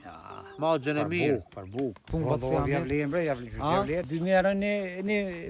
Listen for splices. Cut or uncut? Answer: cut